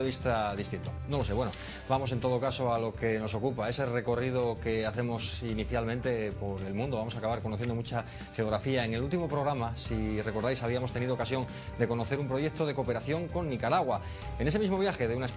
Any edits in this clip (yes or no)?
no